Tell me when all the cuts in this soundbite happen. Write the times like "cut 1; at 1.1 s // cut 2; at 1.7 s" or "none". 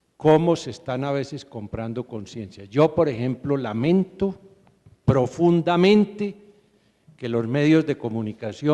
cut 1; at 7.8 s